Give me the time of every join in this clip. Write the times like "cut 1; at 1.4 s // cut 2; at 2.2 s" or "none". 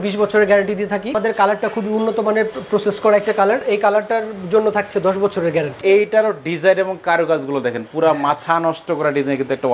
cut 1; at 1.1 s // cut 2; at 3.6 s // cut 3; at 5.7 s